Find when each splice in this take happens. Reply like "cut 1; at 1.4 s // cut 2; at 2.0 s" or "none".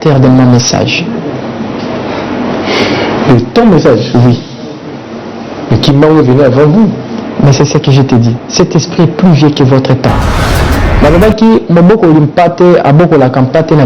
cut 1; at 10.5 s